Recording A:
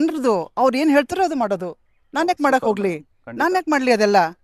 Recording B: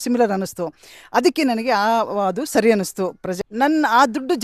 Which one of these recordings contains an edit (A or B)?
B